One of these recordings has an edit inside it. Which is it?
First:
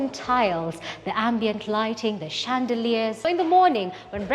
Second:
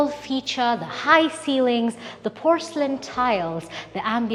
first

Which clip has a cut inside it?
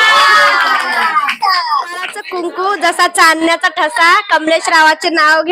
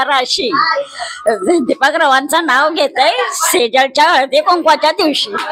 first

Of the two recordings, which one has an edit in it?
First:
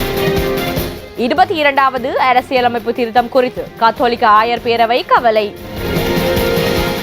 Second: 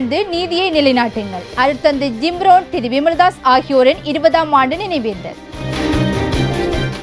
first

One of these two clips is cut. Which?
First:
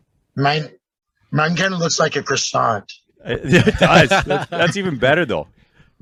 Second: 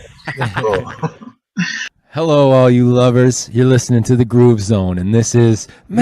second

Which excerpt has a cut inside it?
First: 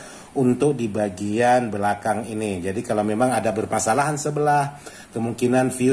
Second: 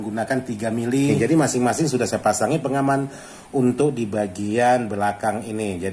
second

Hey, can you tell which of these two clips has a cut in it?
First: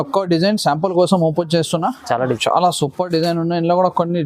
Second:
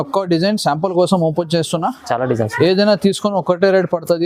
first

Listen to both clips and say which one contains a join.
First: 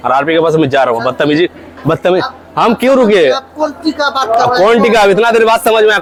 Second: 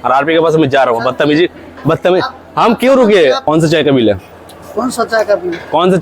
second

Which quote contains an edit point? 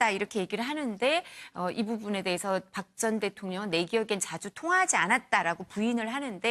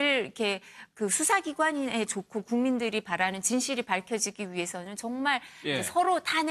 second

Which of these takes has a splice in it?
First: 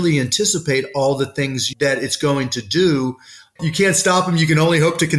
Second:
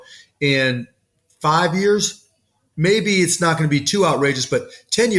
first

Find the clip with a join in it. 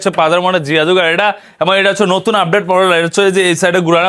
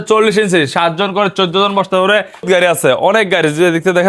second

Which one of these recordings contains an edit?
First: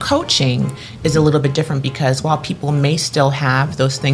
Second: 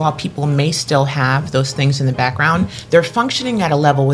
second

